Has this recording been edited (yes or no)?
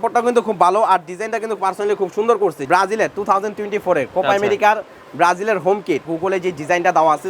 yes